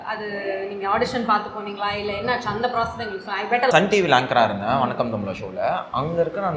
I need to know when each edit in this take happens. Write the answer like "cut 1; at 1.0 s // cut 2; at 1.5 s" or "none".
cut 1; at 3.7 s